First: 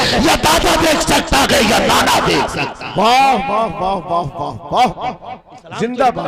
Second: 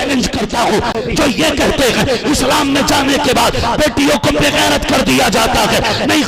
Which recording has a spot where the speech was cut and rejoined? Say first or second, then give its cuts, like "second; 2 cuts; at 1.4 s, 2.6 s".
second; 1 cut; at 0.9 s